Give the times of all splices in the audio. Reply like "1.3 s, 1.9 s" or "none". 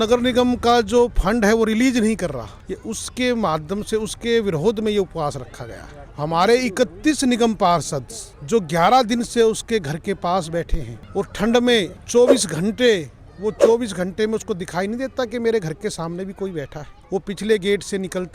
none